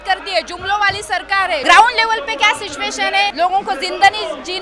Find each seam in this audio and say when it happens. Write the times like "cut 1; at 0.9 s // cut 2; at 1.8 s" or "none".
cut 1; at 1.6 s // cut 2; at 3.3 s

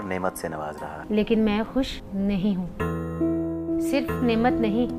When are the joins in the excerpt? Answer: cut 1; at 0.9 s // cut 2; at 3.6 s

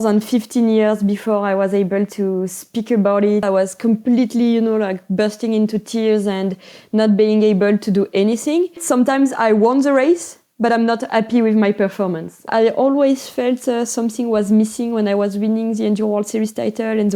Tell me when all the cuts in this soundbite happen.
cut 1; at 3.4 s // cut 2; at 8.8 s // cut 3; at 12.5 s

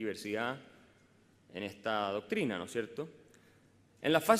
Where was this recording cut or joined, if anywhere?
none

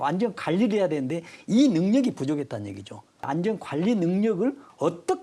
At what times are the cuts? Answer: cut 1; at 3.3 s

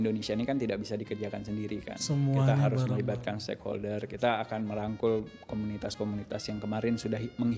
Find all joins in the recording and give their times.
none

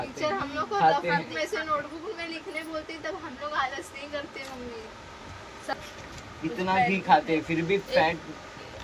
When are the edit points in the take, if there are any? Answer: cut 1; at 5.7 s

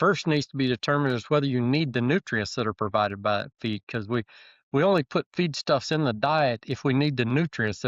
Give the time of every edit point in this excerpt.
none

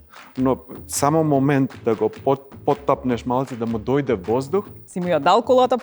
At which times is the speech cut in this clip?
cut 1; at 4.8 s

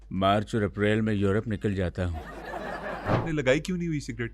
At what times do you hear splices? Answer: cut 1; at 2.9 s

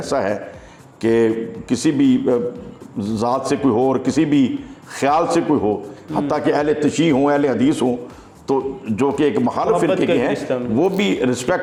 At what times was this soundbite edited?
none

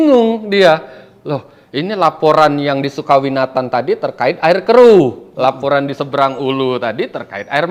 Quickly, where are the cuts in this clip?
none

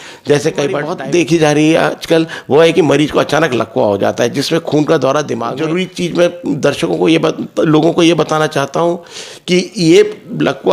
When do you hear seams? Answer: cut 1; at 0.9 s // cut 2; at 5.5 s

